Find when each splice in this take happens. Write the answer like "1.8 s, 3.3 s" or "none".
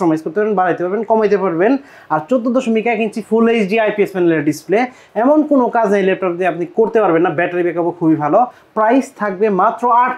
none